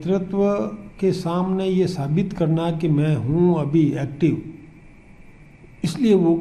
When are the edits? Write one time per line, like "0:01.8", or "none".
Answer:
none